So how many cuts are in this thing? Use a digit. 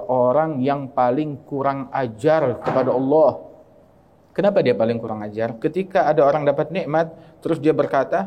1